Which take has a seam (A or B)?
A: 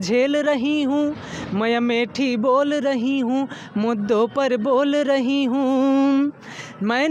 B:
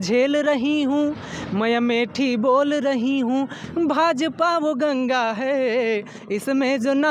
B